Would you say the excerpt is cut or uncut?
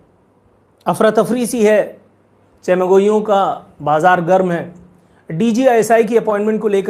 uncut